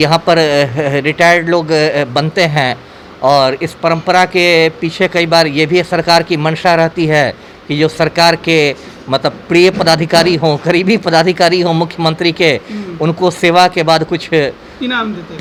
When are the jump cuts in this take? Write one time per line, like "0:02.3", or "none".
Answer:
none